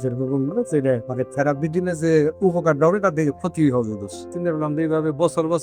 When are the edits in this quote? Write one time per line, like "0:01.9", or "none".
0:01.1
0:04.3